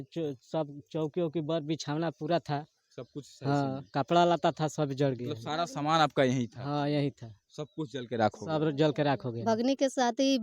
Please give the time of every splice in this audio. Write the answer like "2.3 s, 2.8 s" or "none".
9.3 s